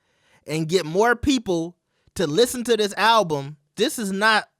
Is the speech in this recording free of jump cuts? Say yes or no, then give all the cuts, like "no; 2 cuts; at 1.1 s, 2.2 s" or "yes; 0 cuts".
no; 1 cut; at 3.7 s